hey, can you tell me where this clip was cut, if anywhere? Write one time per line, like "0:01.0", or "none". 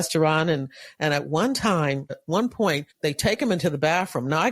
0:02.2
0:02.9

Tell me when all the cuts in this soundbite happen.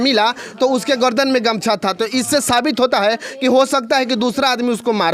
none

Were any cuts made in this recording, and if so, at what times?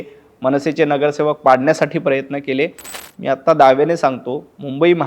0:02.9

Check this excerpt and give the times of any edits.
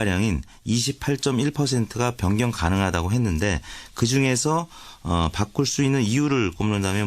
0:04.8

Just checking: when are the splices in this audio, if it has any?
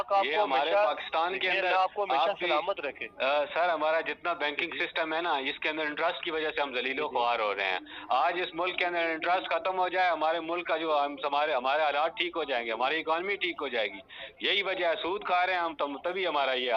none

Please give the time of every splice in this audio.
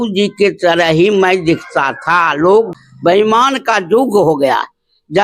0:02.7

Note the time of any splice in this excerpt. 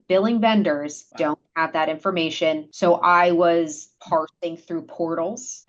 0:01.0
0:02.7
0:03.9

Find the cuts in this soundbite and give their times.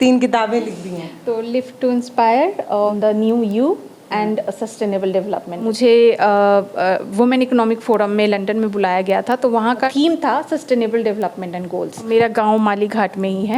0:02.9
0:05.6
0:09.9
0:12.1

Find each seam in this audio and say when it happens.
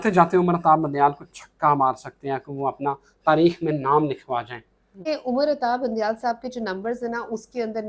0:05.0

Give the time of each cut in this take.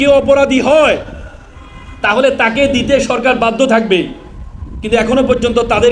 none

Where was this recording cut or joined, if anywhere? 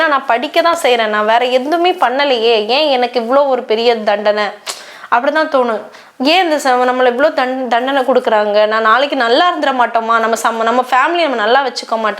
none

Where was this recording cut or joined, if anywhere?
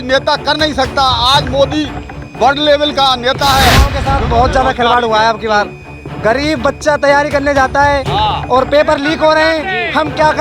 0:04.0

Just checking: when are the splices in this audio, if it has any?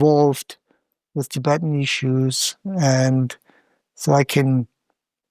none

